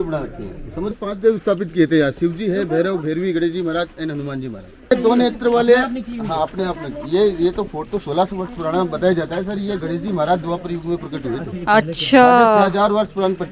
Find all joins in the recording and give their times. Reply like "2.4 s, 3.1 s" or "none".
1.0 s, 4.9 s

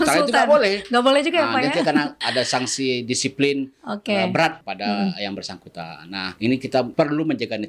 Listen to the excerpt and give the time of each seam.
2.2 s, 4.6 s, 6.2 s, 6.9 s

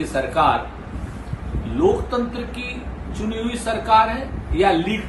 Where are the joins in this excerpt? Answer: none

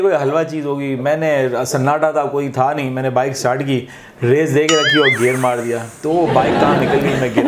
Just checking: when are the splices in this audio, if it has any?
none

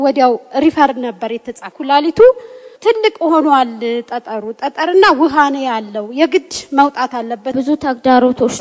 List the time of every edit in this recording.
1.7 s, 2.7 s, 7.5 s

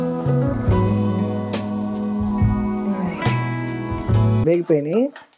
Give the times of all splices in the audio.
none

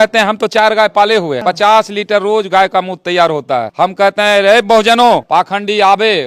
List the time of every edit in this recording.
1.4 s, 3.7 s, 5.2 s

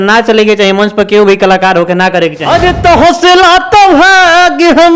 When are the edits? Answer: 2.4 s

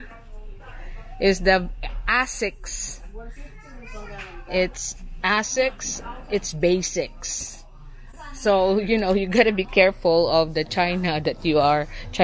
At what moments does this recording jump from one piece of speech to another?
none

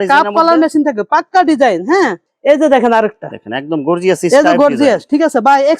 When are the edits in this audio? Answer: 2.3 s

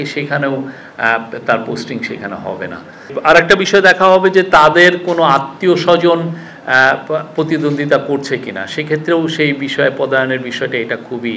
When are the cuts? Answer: 3.2 s

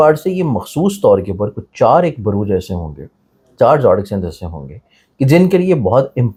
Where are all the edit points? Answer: none

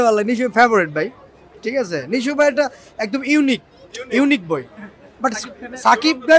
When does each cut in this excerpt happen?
none

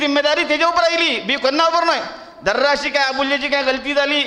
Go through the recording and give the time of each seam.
none

